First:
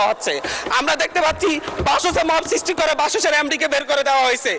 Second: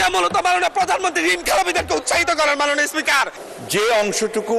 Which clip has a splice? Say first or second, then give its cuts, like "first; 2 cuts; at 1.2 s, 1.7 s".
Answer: second; 1 cut; at 3.4 s